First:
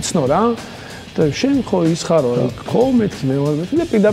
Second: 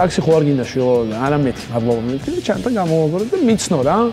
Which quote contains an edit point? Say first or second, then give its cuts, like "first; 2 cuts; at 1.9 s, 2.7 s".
first; 1 cut; at 2.6 s